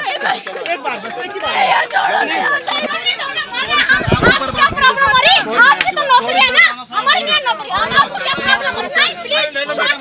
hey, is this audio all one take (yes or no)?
no